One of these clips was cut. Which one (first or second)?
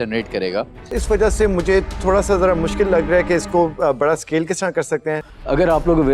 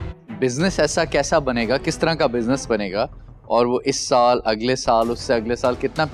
first